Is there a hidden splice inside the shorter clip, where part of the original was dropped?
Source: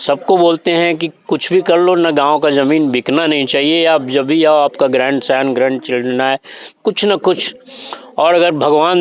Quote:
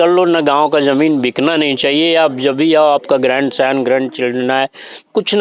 no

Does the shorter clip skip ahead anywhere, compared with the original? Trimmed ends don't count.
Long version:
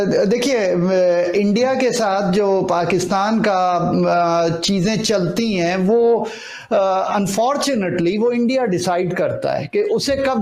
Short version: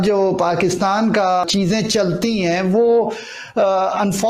yes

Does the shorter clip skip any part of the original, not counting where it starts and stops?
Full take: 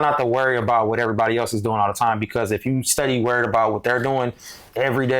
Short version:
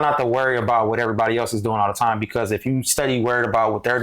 no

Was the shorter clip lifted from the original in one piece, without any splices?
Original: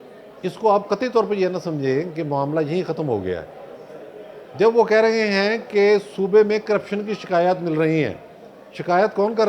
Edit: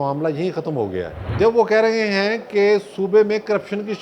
no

